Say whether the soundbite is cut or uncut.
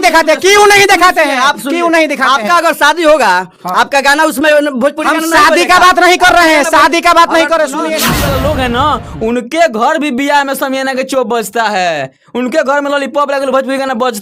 cut